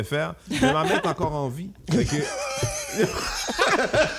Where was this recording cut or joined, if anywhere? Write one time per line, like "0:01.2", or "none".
none